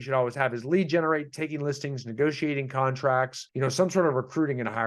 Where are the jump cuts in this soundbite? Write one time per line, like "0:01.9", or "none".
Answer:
0:03.4